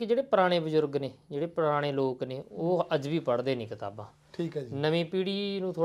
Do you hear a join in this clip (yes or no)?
no